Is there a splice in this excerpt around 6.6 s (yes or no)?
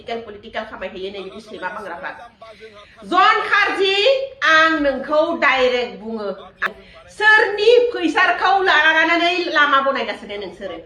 yes